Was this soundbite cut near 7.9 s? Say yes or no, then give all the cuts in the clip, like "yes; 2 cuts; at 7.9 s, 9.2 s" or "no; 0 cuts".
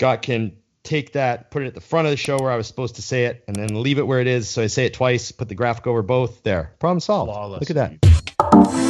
yes; 1 cut; at 7.9 s